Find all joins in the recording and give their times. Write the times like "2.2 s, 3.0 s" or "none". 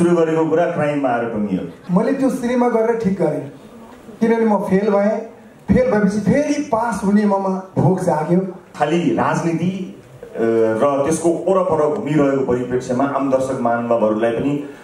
1.8 s, 8.7 s